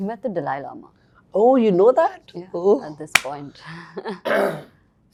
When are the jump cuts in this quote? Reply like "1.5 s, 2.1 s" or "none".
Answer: none